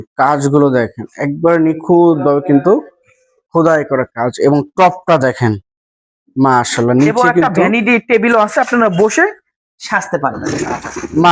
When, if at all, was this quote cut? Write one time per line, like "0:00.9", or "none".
none